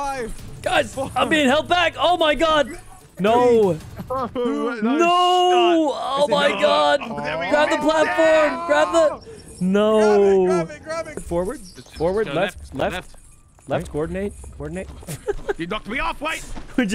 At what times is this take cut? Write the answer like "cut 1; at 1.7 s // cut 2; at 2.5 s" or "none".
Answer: cut 1; at 11.2 s